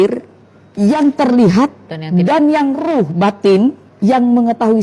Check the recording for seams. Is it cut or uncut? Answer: cut